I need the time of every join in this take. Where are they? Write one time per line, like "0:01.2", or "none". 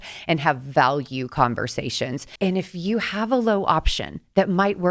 0:02.2